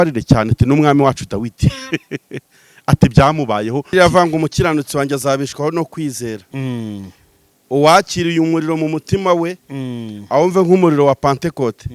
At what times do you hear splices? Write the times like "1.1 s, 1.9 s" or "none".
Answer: 3.9 s